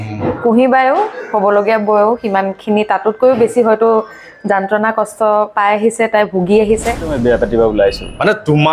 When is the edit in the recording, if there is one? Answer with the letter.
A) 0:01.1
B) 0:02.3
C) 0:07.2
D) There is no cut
C